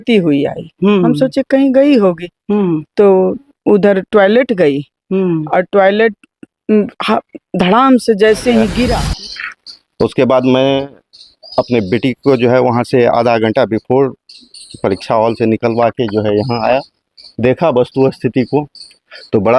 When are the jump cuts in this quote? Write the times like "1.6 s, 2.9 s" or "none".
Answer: 9.1 s